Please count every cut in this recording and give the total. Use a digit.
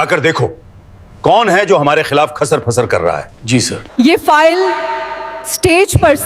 1